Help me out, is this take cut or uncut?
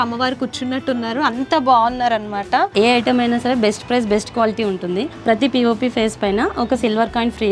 cut